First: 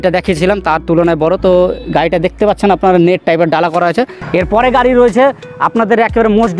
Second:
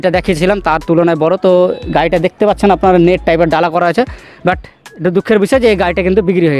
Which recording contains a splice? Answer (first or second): first